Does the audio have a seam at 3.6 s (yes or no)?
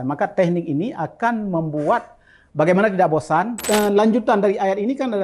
yes